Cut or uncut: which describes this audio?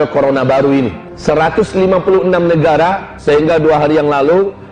cut